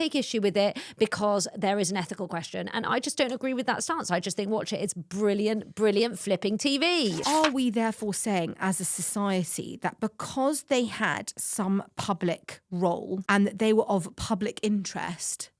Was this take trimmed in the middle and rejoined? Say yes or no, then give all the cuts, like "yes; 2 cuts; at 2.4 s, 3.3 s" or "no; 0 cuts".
yes; 2 cuts; at 7.2 s, 13.2 s